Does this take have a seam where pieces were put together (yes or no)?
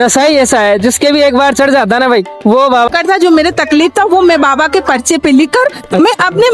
yes